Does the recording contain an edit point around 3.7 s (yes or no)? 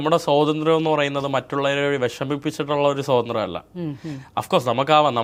no